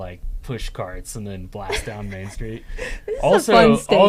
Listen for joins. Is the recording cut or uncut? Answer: uncut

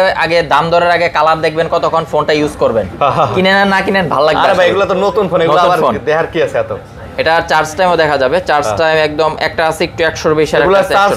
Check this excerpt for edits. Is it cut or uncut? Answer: uncut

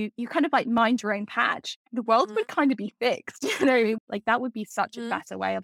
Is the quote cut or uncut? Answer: cut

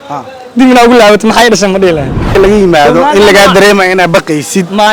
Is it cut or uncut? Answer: cut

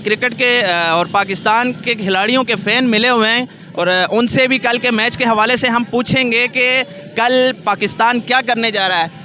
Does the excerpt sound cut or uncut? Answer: uncut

